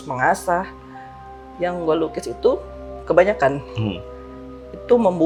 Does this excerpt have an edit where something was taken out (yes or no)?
no